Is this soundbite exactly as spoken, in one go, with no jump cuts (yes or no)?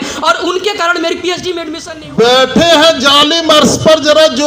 no